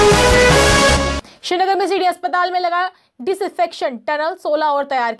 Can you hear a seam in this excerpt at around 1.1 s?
yes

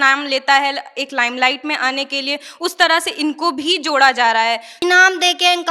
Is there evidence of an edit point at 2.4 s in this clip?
no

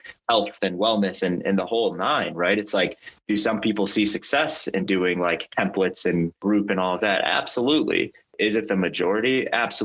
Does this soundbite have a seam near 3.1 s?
yes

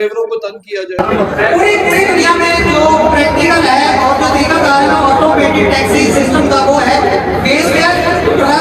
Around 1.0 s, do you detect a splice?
yes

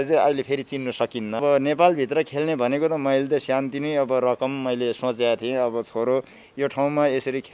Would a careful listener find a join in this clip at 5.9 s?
no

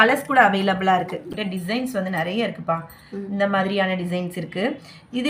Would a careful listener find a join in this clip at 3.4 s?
no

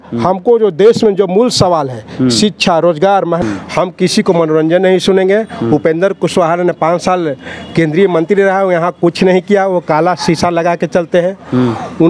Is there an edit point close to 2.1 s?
no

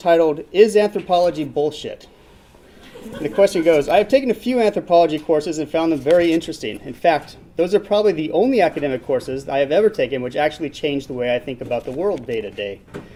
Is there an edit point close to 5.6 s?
no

